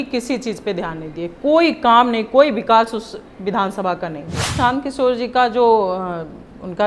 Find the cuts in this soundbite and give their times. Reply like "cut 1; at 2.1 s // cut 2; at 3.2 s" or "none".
cut 1; at 4.4 s